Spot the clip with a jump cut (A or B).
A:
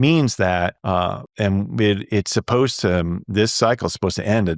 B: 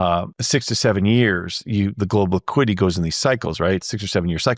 A